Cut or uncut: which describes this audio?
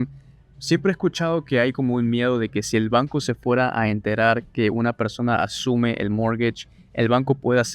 uncut